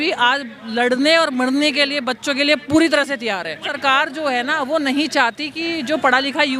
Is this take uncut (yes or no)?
no